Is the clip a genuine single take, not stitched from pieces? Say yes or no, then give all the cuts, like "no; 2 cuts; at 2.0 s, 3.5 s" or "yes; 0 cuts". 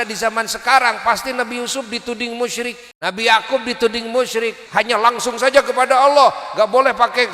no; 2 cuts; at 2.9 s, 4.6 s